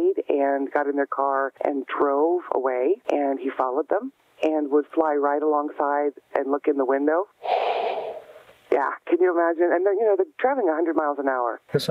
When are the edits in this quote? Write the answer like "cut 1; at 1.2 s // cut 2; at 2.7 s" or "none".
cut 1; at 1.5 s // cut 2; at 3.0 s

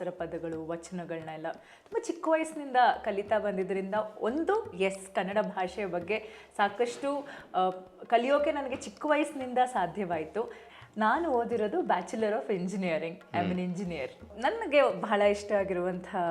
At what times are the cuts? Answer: cut 1; at 10.6 s // cut 2; at 14.3 s

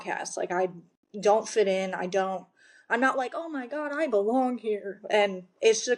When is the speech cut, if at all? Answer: none

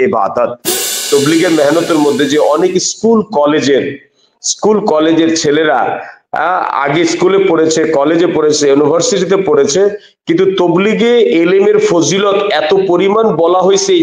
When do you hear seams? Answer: cut 1; at 0.9 s

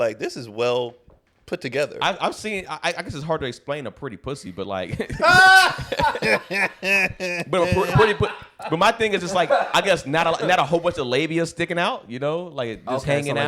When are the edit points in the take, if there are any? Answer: none

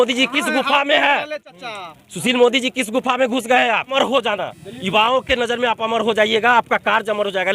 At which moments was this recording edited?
cut 1; at 4.0 s

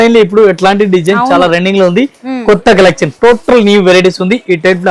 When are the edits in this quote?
none

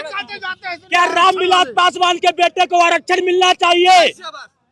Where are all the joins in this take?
none

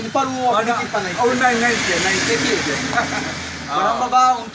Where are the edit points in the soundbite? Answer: none

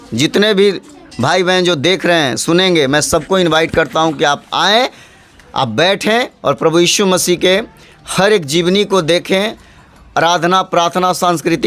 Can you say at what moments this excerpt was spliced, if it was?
none

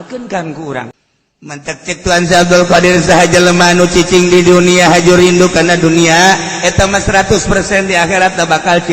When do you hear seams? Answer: cut 1; at 0.9 s

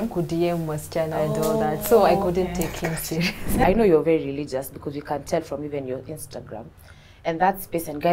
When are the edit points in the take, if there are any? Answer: cut 1; at 3.6 s

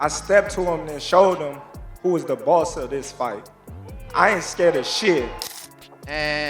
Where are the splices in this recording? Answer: cut 1; at 5.4 s

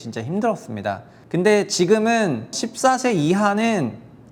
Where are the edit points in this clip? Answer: cut 1; at 1.1 s // cut 2; at 2.6 s

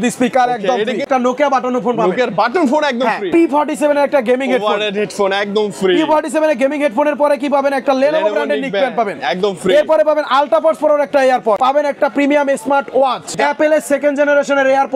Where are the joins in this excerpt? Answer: cut 1; at 1.1 s // cut 2; at 3.2 s // cut 3; at 11.6 s // cut 4; at 13.3 s

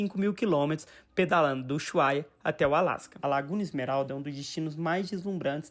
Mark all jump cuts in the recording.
cut 1; at 3.1 s

